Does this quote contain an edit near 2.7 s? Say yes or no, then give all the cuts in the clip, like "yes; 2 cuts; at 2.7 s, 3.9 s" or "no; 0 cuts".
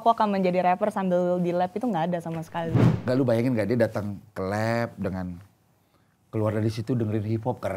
yes; 1 cut; at 2.7 s